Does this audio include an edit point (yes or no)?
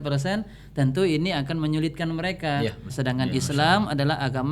yes